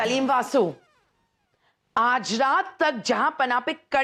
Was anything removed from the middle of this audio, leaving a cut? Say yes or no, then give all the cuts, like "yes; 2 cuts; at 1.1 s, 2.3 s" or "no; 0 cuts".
no; 0 cuts